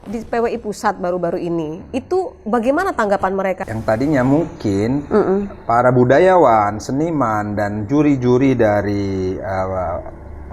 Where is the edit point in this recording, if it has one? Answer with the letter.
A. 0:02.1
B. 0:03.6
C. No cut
B